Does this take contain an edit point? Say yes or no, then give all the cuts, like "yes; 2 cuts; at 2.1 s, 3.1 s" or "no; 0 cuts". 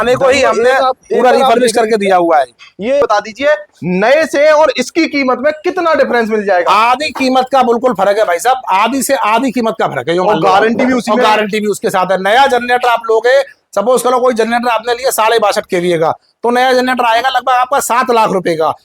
yes; 1 cut; at 3.0 s